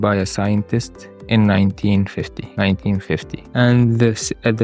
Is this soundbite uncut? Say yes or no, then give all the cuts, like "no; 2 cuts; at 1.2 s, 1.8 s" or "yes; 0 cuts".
no; 2 cuts; at 2.4 s, 3.4 s